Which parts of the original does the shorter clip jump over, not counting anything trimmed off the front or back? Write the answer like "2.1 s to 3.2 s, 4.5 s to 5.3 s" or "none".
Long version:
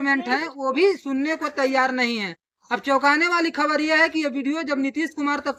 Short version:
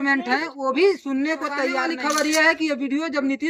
1.9 s to 3.4 s